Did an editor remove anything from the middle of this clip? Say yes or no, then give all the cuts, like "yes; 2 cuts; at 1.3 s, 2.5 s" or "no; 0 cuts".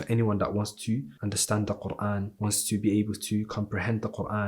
yes; 2 cuts; at 1.1 s, 2.3 s